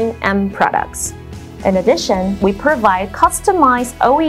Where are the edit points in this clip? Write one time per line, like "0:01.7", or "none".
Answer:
0:01.3